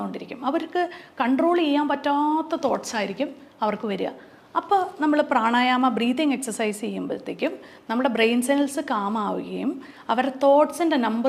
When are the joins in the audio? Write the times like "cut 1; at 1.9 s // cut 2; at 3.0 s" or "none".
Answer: none